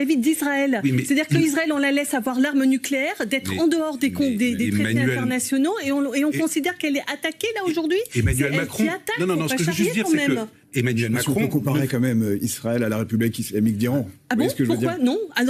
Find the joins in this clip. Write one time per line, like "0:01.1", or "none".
none

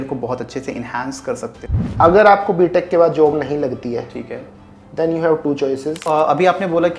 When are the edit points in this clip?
0:01.6
0:06.0

